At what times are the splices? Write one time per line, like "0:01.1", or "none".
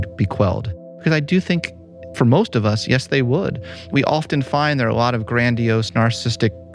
0:00.9
0:02.0
0:03.9